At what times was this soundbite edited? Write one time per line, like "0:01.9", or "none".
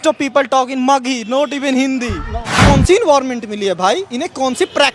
0:02.6